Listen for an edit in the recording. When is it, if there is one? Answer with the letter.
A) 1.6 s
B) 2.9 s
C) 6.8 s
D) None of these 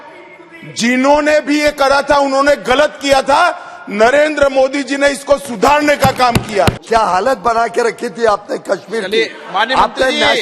C